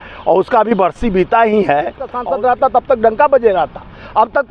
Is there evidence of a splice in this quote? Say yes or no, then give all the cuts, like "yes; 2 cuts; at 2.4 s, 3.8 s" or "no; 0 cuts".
yes; 1 cut; at 2.2 s